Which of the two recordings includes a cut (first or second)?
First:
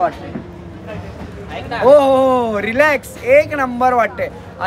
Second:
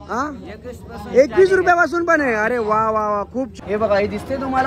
second